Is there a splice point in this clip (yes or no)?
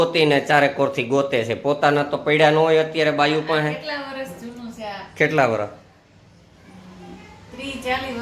no